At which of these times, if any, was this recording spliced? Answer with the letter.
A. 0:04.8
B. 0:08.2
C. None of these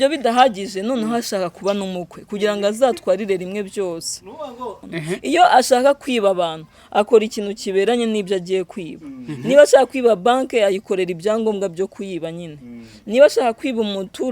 A